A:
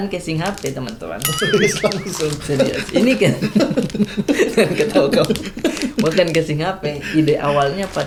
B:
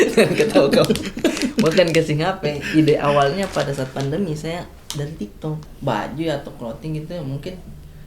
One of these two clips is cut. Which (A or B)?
B